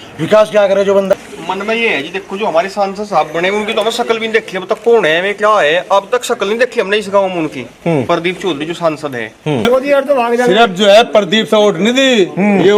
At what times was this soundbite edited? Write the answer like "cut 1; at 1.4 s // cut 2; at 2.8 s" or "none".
cut 1; at 1.1 s // cut 2; at 9.6 s